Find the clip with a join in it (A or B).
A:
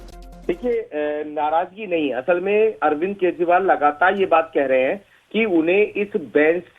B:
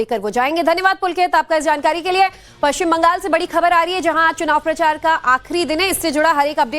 B